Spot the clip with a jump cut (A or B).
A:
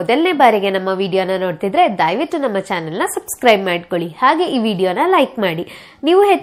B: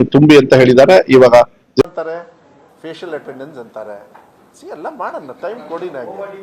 B